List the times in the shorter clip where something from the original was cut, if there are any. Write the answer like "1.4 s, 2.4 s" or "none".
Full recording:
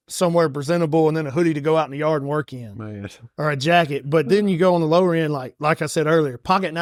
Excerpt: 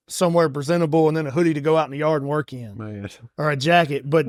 none